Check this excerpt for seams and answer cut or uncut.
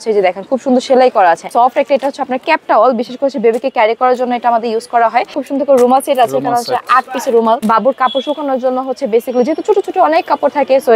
cut